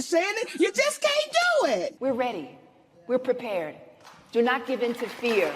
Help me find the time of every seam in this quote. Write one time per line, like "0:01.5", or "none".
0:01.9